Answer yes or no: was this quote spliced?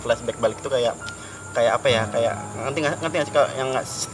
no